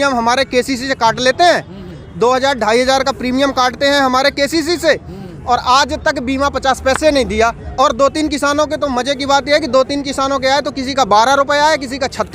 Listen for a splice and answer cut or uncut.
uncut